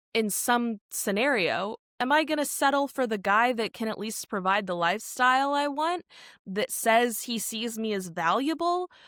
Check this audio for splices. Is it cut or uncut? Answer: uncut